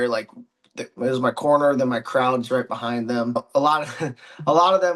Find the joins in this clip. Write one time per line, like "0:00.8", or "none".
0:03.4